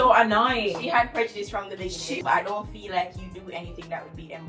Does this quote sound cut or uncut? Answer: cut